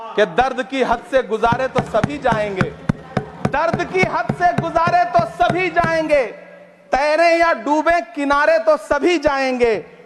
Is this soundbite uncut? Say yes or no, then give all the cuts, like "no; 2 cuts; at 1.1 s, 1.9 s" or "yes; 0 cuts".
yes; 0 cuts